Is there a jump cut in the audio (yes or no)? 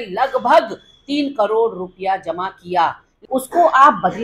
yes